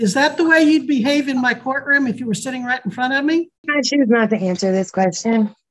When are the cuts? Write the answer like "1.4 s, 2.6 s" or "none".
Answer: 3.7 s

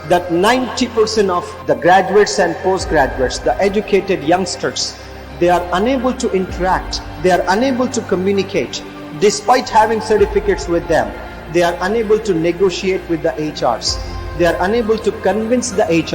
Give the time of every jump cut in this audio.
1.5 s

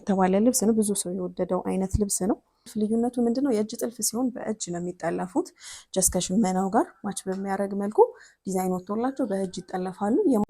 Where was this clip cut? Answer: 2.6 s

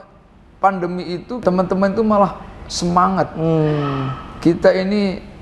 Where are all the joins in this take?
1.4 s

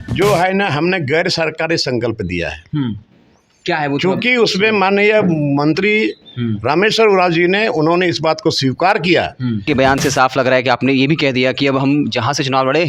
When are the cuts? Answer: 9.6 s

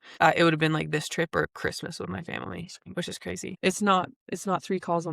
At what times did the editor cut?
3.5 s

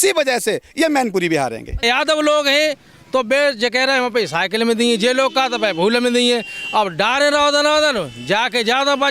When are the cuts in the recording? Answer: 1.8 s

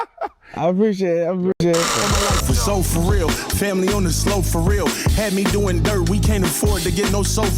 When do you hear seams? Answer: 1.9 s

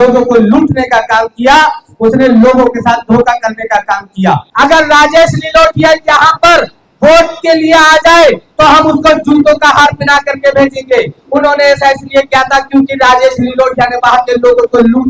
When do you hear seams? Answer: 4.5 s

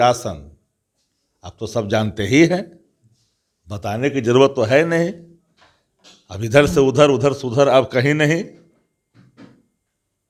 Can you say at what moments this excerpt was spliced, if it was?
none

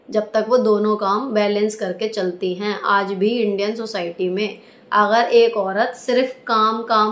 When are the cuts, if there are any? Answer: none

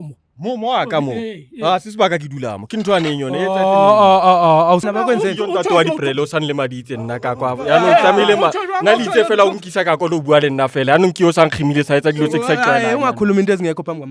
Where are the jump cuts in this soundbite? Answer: 4.8 s

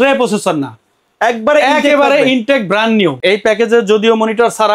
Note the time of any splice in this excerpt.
3.2 s

